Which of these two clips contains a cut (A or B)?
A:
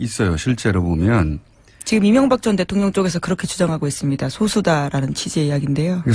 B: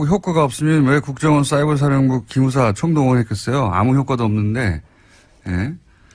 B